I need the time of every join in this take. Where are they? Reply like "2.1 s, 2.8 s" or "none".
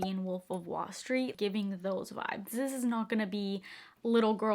1.3 s

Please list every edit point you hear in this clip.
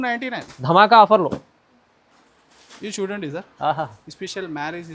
none

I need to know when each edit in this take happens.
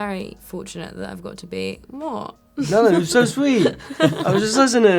none

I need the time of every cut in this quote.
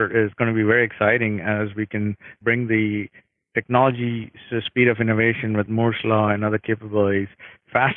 none

